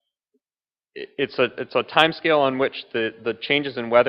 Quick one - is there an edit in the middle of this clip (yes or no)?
yes